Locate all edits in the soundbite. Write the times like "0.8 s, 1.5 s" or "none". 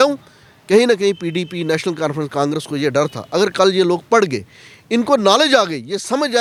none